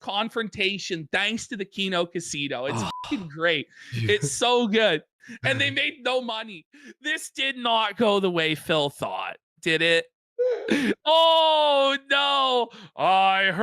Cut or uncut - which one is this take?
cut